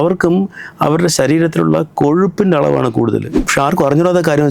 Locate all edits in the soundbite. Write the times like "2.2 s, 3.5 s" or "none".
3.4 s